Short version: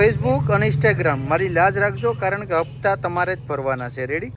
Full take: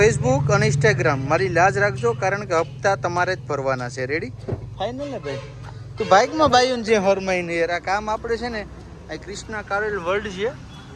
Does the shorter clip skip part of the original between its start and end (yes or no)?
no